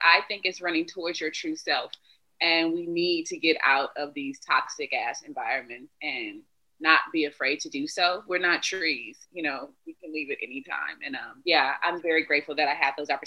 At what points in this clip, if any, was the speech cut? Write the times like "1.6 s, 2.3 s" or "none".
11.4 s